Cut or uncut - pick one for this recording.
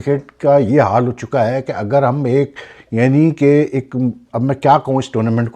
uncut